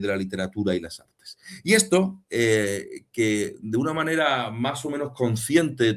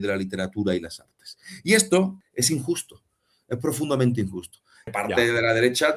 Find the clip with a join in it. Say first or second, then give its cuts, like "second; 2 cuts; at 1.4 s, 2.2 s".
second; 2 cuts; at 2.2 s, 4.7 s